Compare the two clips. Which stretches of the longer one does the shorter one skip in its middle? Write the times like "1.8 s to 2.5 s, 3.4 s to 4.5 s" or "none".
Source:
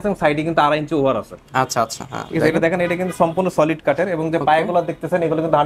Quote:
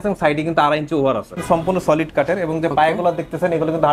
1.4 s to 3.1 s